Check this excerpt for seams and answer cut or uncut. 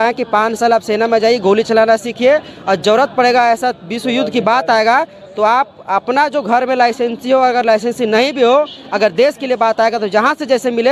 uncut